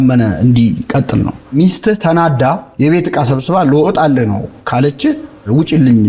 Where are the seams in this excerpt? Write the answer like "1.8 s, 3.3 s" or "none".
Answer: 1.5 s, 2.7 s